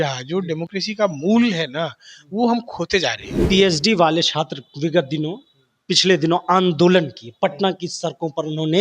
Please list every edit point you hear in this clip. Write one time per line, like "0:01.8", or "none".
0:03.4